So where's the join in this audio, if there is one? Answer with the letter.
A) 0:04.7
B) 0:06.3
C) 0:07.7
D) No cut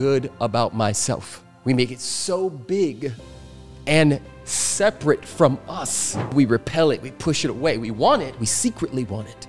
B